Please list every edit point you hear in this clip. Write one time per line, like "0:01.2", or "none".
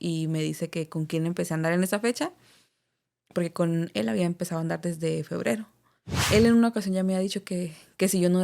0:06.1